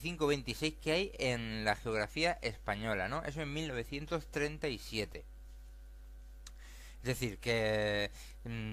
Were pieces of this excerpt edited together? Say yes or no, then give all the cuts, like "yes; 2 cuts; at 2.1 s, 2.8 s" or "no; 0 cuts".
no; 0 cuts